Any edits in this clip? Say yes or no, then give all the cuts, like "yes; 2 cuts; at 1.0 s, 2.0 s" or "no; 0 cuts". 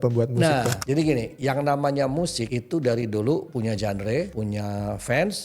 yes; 4 cuts; at 0.8 s, 2.5 s, 3.5 s, 4.3 s